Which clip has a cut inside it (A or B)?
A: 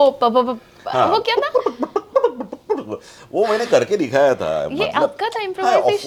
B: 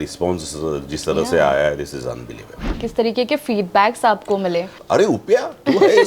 B